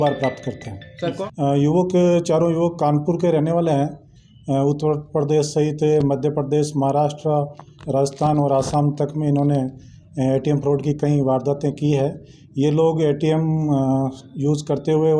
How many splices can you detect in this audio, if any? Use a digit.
1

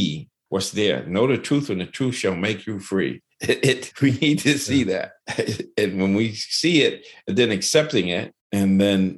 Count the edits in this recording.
1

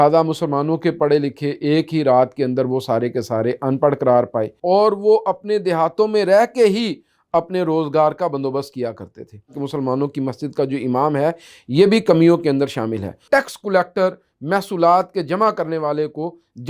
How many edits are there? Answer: 3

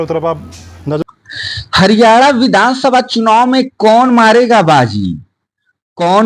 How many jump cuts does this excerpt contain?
1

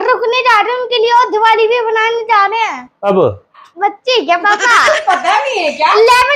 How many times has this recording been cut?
2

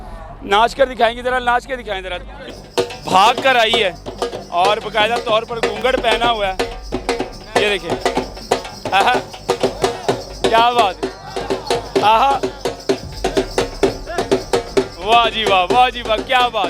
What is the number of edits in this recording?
1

